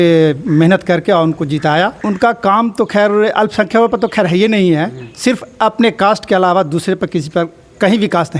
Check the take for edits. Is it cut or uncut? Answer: cut